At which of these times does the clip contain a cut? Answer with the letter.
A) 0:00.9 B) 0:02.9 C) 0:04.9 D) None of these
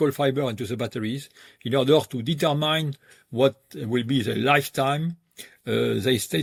D